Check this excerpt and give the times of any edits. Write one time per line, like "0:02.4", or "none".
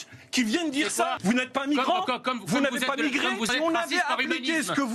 0:01.2
0:03.5